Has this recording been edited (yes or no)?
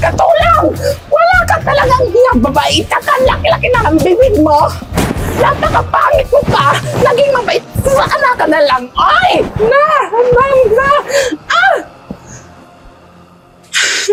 no